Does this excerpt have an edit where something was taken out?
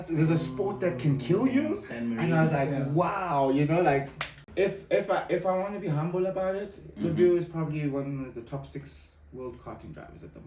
yes; 1 cut; at 4.4 s

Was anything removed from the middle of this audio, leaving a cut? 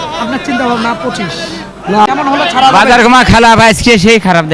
yes; 1 cut; at 2.1 s

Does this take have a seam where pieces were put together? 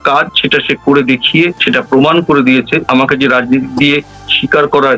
yes; 2 cuts; at 1.6 s, 2.8 s

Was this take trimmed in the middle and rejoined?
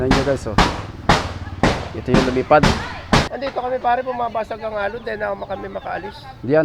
yes; 1 cut; at 3.3 s

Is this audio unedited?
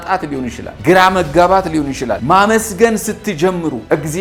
yes; 0 cuts

